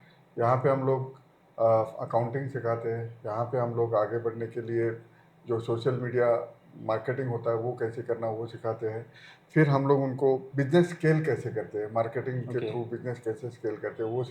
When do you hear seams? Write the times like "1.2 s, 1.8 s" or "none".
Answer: 10.5 s